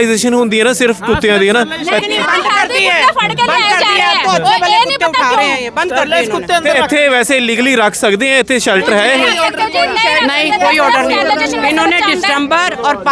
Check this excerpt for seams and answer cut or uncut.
uncut